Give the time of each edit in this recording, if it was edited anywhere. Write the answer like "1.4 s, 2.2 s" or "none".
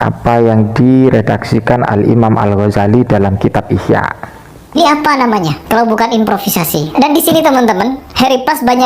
4.7 s